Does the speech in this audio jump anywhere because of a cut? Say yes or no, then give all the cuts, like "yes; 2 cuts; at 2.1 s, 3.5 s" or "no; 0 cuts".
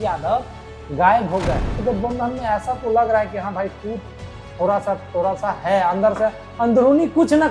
yes; 1 cut; at 1.8 s